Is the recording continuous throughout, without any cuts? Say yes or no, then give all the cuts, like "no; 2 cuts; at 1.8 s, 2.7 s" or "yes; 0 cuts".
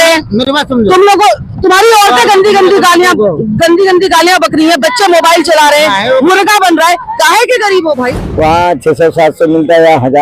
no; 1 cut; at 8.2 s